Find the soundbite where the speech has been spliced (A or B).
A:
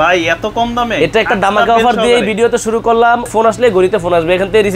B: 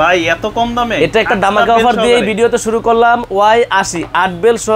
A